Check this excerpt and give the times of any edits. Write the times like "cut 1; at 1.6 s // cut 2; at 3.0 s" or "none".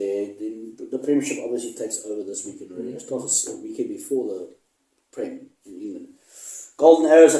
none